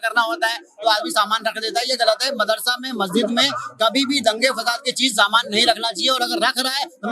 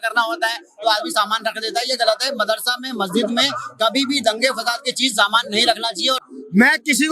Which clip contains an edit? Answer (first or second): second